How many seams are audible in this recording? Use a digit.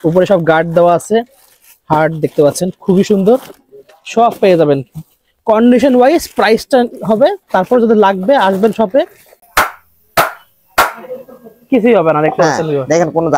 1